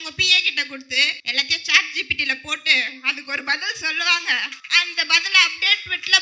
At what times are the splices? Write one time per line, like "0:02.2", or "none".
0:01.2
0:04.6

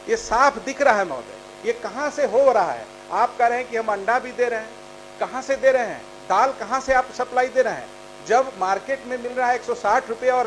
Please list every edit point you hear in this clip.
none

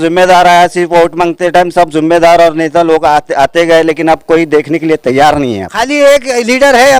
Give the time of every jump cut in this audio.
0:05.7

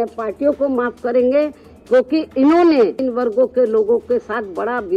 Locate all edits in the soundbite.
0:03.0

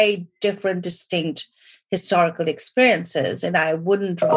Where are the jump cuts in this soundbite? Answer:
none

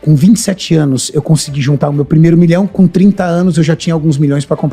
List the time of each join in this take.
none

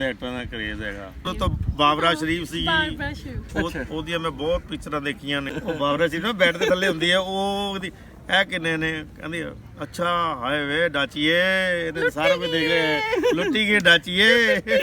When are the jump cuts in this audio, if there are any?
0:01.3
0:05.5

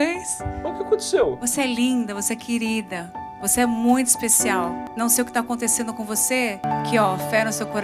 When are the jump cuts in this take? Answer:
0:06.6

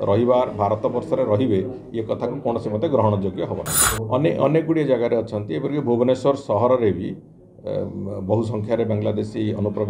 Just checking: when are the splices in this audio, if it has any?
0:03.8

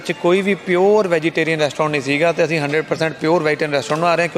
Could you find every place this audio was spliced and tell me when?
none

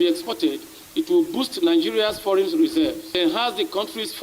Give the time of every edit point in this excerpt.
0:03.2

